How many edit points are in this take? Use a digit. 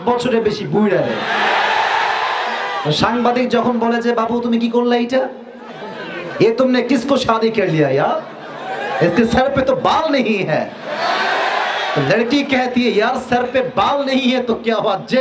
0